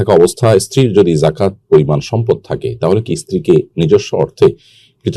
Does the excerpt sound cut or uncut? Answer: uncut